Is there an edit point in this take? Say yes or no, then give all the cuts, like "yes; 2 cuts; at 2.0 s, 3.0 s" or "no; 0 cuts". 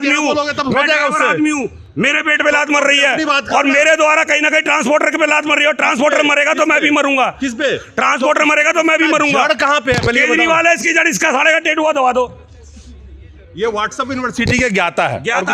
no; 0 cuts